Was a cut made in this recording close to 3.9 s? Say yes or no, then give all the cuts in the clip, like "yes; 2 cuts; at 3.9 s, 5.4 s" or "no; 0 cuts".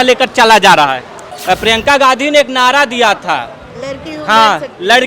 no; 1 cut; at 1.3 s